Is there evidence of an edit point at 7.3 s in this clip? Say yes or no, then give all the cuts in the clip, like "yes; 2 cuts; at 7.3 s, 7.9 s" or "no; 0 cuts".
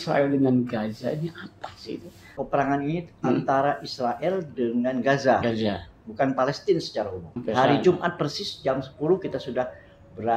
yes; 2 cuts; at 2.4 s, 7.3 s